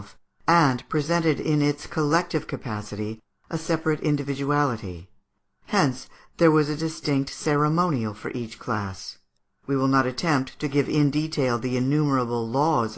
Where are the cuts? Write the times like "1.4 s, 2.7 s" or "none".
9.9 s